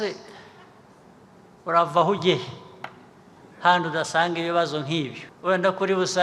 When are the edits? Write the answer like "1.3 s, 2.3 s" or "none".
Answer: 5.2 s

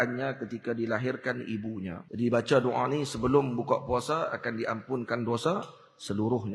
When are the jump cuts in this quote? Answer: 2.0 s

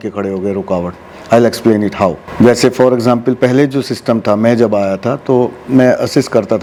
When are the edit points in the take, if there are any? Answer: none

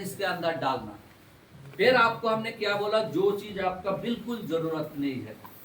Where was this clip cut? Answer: none

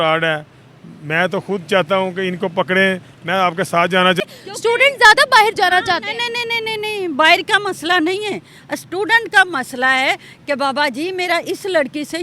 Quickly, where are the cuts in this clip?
4.2 s

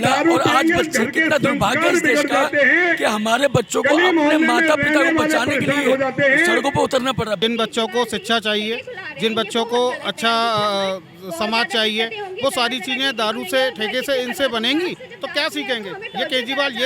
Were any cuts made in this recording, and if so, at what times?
7.4 s, 15.1 s

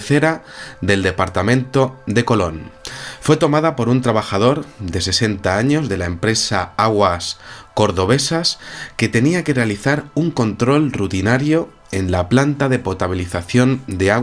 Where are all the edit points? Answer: 7.6 s

